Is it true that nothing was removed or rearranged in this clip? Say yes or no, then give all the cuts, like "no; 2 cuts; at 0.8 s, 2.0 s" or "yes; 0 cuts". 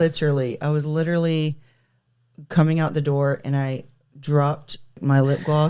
yes; 0 cuts